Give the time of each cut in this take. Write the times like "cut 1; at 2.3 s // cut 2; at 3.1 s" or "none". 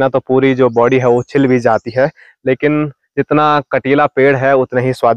none